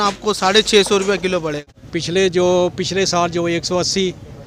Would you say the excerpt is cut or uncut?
cut